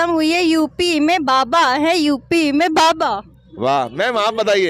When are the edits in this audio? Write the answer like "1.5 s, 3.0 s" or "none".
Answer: none

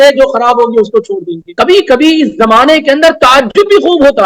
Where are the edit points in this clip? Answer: 1.4 s

